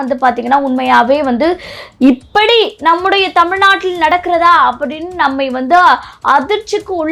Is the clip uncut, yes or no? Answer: yes